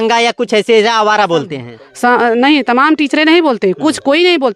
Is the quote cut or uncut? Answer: uncut